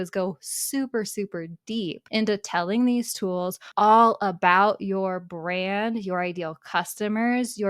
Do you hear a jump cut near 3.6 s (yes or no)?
yes